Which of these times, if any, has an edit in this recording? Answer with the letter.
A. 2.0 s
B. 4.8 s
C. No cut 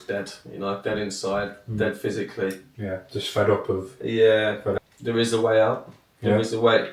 B